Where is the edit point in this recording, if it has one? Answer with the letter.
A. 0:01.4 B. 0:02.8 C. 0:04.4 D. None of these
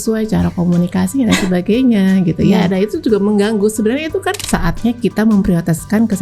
C